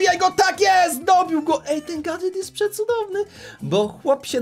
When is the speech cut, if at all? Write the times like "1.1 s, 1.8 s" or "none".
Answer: none